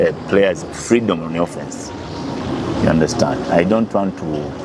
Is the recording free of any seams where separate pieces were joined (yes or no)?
yes